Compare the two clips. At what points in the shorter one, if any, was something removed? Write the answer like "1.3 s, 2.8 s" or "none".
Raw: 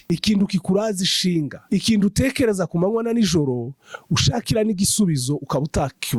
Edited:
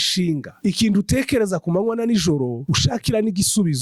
2.6 s